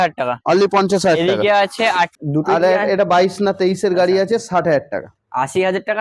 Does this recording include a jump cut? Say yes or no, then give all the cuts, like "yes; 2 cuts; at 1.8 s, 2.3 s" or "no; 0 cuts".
yes; 1 cut; at 2.2 s